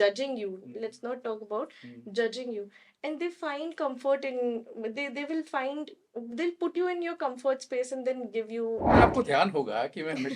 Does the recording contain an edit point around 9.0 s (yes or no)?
yes